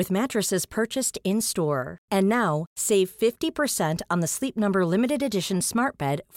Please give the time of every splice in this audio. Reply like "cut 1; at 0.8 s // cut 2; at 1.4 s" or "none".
none